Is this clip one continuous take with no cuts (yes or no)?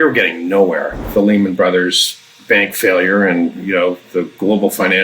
no